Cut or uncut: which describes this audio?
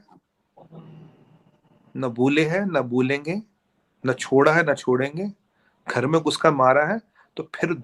uncut